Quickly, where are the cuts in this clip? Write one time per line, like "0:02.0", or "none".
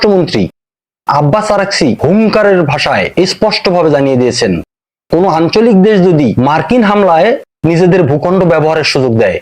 0:02.0
0:03.1

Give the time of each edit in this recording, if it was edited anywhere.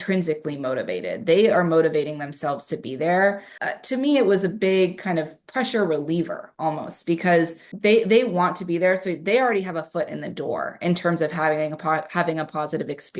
0:03.5
0:07.6

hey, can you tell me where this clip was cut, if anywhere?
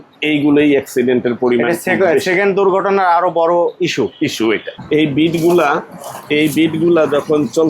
0:04.7

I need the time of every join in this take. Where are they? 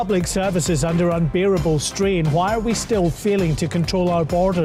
none

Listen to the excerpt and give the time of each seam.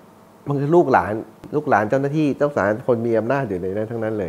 0:01.4

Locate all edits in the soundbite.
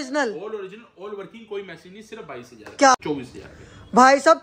0:03.0

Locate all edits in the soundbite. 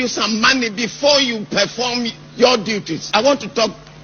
0:03.1

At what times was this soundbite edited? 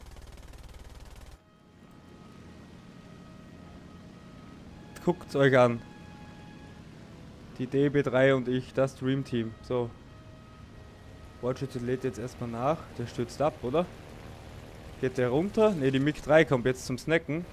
none

